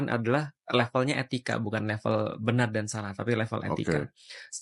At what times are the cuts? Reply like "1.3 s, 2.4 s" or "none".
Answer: none